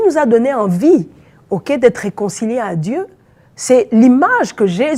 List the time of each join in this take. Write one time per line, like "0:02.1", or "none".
none